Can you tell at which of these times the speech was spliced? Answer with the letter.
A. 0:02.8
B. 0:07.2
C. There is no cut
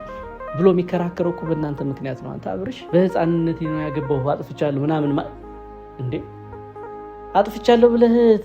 A